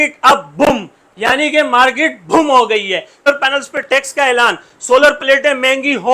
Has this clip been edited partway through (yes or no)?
yes